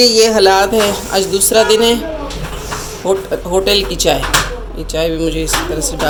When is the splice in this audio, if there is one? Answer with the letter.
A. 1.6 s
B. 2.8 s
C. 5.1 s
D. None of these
D